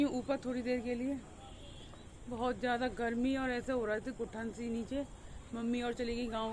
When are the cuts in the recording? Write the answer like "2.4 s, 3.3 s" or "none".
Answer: none